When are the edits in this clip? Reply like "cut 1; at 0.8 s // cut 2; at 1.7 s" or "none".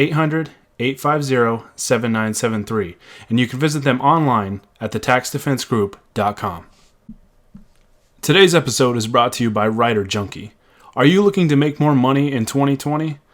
cut 1; at 6.9 s